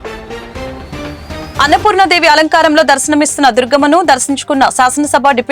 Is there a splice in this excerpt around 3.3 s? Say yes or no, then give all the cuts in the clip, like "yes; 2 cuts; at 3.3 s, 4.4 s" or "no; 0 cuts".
no; 1 cut; at 1.0 s